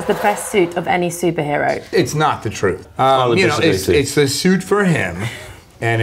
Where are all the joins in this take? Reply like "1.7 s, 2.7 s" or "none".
1.9 s, 2.9 s